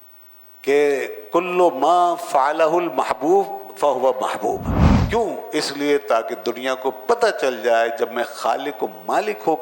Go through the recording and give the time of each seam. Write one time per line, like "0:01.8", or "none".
0:04.9